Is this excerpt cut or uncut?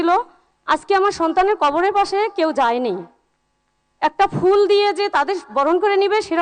uncut